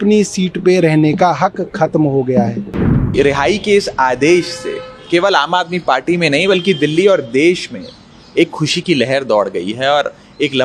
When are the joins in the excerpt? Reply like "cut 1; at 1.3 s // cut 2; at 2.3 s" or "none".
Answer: cut 1; at 3.1 s